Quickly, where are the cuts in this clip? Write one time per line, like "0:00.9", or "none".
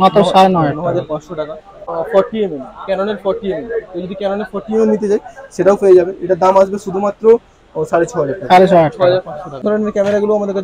0:01.8
0:09.6